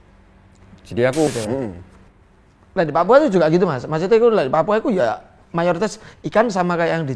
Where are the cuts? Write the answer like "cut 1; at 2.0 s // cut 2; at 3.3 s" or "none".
cut 1; at 1.3 s